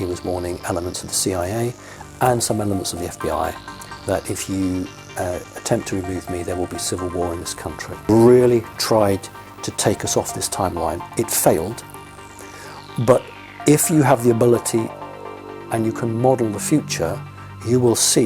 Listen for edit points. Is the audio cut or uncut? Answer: cut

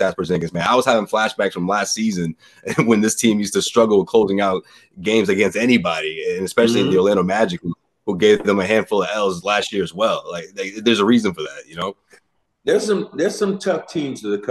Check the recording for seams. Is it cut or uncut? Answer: uncut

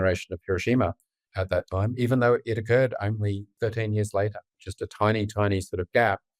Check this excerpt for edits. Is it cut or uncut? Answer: cut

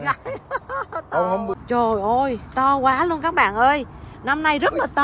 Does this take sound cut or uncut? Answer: cut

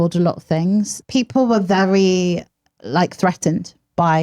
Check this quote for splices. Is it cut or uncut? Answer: cut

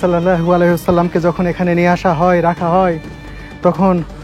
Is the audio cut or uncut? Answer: uncut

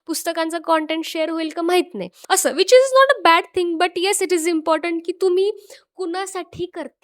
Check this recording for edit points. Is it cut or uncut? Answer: cut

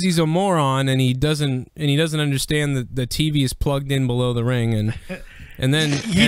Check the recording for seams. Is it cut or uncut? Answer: uncut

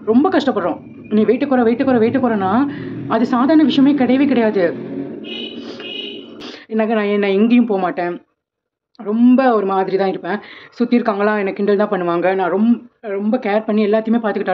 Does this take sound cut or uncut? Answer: cut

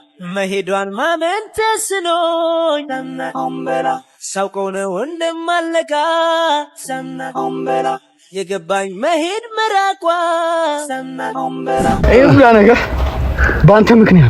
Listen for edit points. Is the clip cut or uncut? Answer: cut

